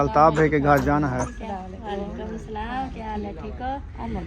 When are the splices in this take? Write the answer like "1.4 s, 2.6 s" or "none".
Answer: 1.3 s

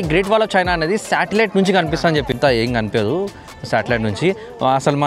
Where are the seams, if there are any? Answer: 2.3 s

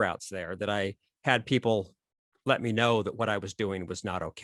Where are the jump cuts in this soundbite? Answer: none

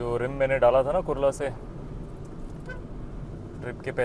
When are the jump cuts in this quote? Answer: none

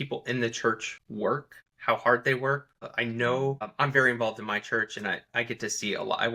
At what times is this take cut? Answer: 1.3 s, 2.8 s, 3.7 s, 5.2 s

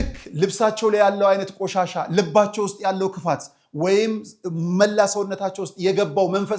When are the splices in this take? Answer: none

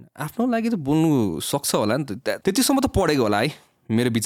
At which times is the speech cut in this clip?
2.4 s

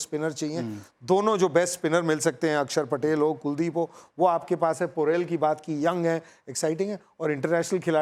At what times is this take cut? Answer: none

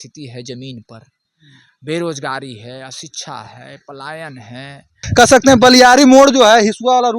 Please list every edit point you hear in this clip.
5.0 s

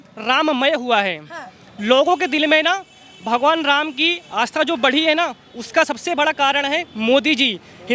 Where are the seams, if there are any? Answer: none

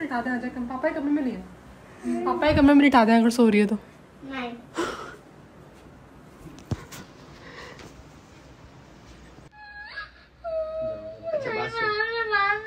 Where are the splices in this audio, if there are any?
9.5 s

